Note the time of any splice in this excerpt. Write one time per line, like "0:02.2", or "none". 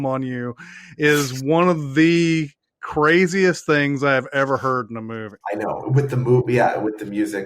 0:05.3